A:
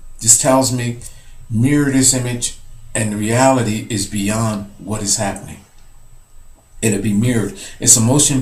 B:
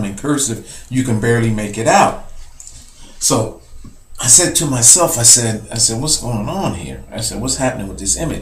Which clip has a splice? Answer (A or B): B